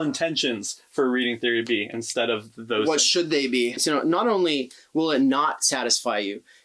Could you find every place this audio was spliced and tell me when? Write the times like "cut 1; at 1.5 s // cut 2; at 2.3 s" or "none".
cut 1; at 3.8 s